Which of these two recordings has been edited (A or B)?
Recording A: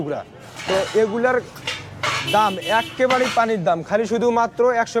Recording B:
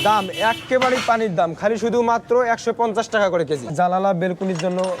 B